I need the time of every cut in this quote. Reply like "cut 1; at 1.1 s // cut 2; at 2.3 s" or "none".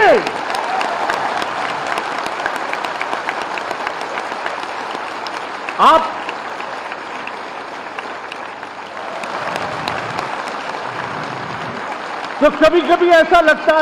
cut 1; at 8.9 s